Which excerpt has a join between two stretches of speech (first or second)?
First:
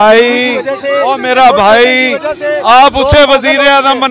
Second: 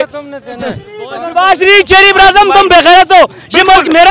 second